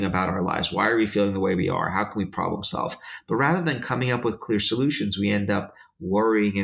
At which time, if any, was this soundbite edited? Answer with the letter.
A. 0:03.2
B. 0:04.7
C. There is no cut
C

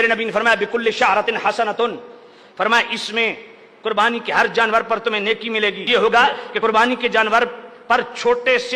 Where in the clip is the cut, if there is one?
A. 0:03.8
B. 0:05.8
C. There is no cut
B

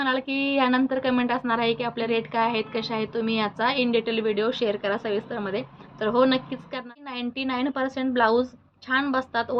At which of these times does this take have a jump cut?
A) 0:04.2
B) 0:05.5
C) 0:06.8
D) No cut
C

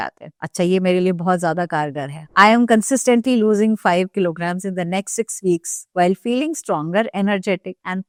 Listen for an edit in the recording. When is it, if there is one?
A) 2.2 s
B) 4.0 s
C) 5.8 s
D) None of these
D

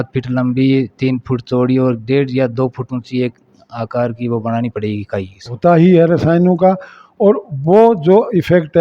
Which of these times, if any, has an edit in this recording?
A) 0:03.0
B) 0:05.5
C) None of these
B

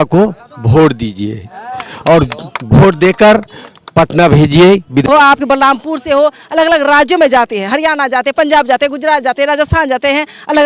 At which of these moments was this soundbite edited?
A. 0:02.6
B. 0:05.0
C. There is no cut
B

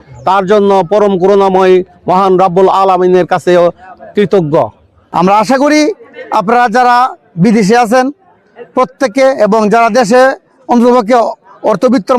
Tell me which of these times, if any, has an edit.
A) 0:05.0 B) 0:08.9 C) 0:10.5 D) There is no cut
A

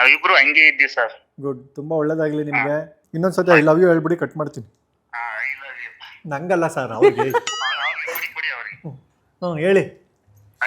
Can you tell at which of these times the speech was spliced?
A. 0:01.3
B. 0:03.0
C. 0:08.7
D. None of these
B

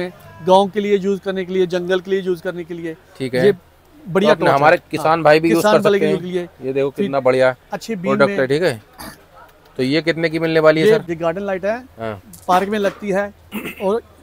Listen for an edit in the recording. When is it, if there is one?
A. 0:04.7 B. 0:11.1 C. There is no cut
B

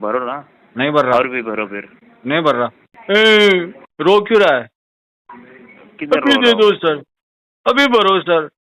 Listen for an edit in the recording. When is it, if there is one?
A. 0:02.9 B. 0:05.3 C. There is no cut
A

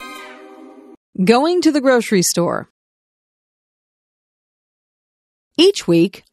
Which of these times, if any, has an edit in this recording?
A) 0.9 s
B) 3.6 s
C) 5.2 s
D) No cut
A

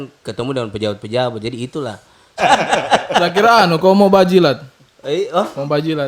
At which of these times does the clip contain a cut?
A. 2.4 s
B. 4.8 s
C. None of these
A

